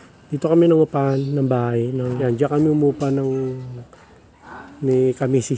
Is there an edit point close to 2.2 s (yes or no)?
yes